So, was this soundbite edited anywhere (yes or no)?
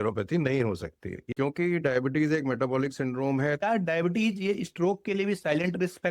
yes